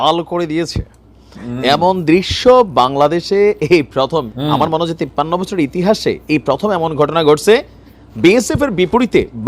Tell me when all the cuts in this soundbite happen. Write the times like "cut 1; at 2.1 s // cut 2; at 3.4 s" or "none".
cut 1; at 4.3 s